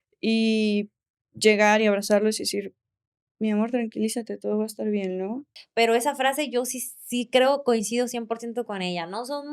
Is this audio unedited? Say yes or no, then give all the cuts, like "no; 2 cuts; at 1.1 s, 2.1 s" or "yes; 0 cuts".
no; 1 cut; at 5.5 s